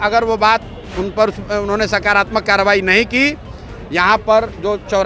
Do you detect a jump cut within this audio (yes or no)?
no